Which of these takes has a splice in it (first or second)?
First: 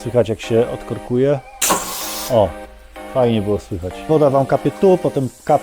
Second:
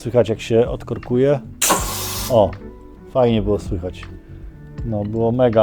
first